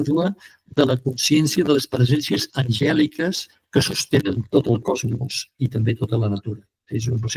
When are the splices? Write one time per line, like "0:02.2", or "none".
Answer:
none